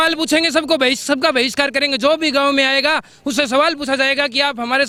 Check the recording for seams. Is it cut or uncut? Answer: uncut